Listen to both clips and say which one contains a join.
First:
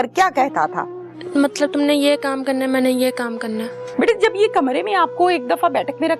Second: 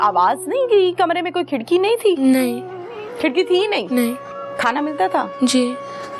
first; 2 cuts; at 1.2 s, 3.8 s

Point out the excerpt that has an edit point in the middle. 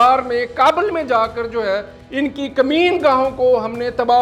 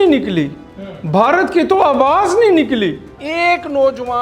second; 1 cut; at 3.2 s

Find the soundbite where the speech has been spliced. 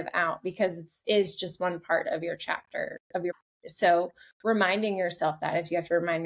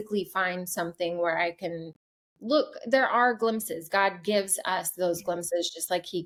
first; 1 cut; at 3.3 s

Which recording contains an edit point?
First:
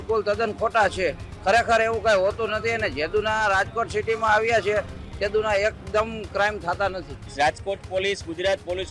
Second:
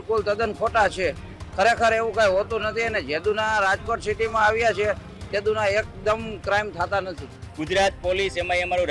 first; 2 cuts; at 1.3 s, 7.3 s

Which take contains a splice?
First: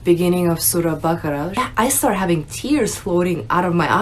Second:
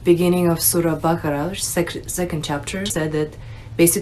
first; 1 cut; at 1.6 s

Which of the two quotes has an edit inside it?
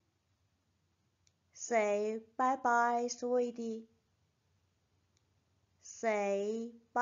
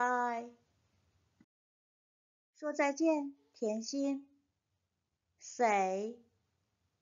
second; 1 cut; at 2.9 s

